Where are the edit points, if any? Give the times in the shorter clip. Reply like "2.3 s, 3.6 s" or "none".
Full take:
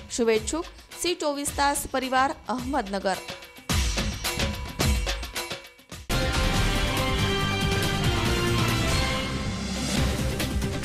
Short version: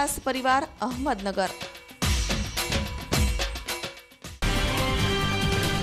4.4 s